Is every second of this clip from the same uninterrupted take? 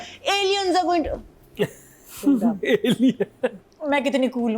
no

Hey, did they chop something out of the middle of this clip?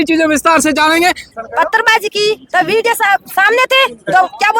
yes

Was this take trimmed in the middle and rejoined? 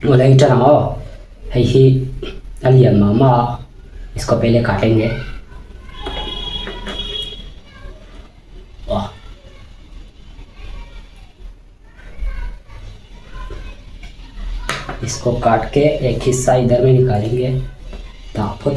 no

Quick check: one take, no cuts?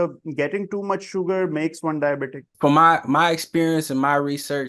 no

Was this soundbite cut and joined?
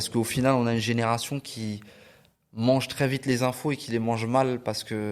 no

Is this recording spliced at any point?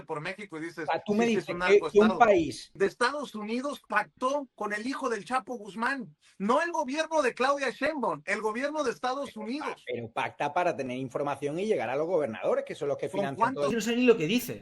yes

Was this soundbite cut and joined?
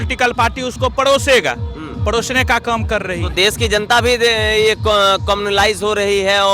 no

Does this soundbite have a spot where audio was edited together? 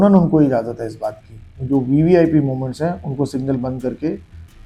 no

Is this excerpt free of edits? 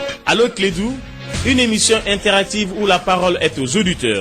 yes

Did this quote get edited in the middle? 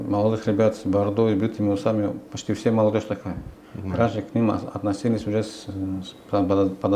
no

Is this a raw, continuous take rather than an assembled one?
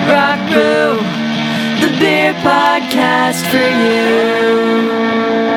yes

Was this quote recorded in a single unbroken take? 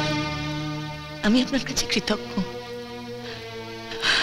yes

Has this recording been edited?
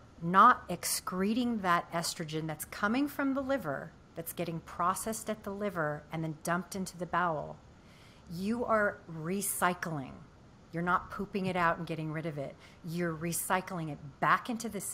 no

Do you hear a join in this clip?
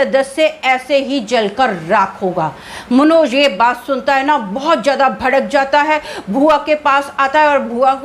no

